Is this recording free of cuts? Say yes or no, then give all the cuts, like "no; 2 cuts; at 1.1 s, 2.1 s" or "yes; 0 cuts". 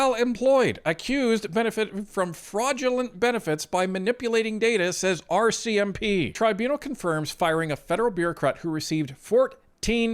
no; 1 cut; at 6.3 s